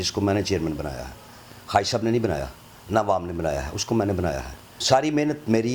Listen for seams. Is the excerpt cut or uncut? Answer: cut